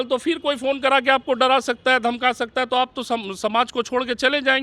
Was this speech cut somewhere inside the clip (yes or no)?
no